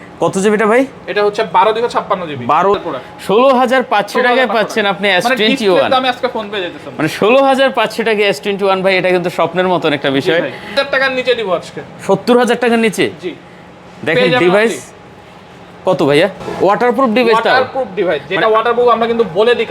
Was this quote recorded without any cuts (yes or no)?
no